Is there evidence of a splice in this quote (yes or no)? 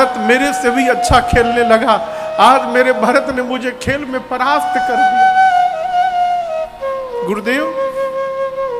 no